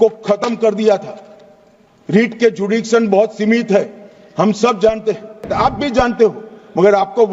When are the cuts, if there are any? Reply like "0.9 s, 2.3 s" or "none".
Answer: 5.5 s